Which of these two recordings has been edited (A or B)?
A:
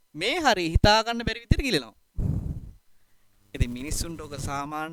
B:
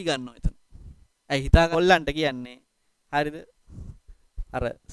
B